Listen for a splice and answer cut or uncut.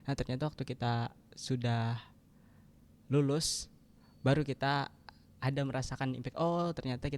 uncut